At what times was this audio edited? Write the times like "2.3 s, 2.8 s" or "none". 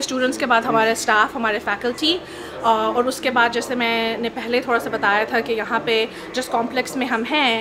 none